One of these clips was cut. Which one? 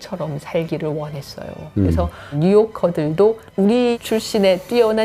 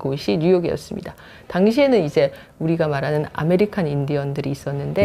first; 2 cuts; at 2.4 s, 3.7 s

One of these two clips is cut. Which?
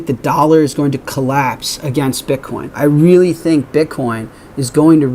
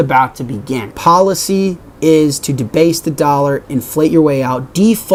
first; 1 cut; at 2.6 s

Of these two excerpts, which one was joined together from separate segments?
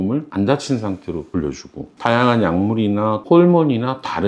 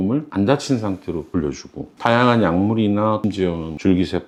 first; 1 cut; at 3.2 s

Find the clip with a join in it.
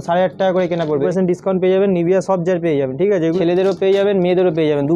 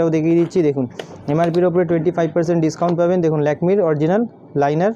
first; 2 cuts; at 1.1 s, 3.4 s

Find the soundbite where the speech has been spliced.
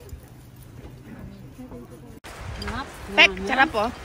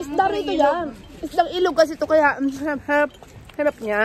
first; 1 cut; at 2.2 s

